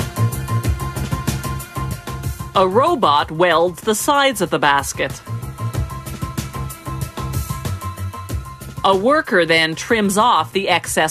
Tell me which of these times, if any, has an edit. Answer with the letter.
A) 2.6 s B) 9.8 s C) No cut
C